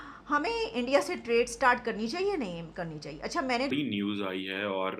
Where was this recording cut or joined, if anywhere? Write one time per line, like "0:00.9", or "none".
0:03.7

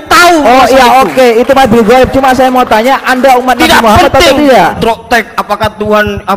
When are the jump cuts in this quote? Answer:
0:04.8

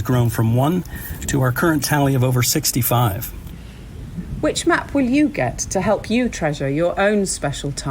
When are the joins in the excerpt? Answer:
0:03.7

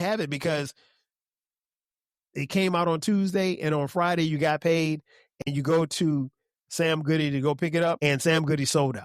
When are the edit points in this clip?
0:08.0

